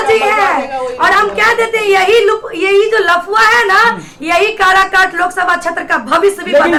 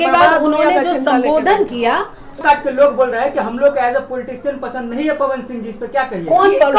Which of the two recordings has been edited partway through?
second; 1 cut; at 2.4 s

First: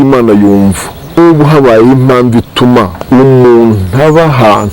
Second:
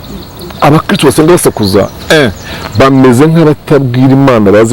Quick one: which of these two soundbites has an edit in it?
first; 2 cuts; at 1.2 s, 3.0 s

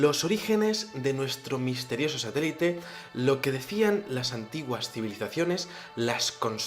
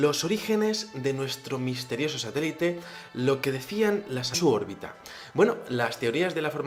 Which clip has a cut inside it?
first; 1 cut; at 4.3 s

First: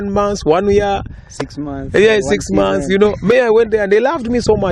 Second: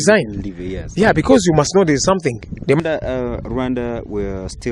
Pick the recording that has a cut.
second; 1 cut; at 2.8 s

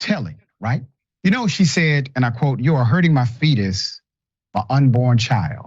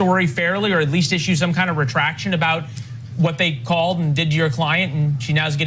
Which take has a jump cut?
first; 1 cut; at 1.0 s

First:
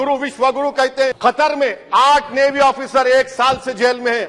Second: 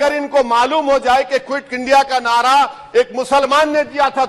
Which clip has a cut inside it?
first; 1 cut; at 1.2 s

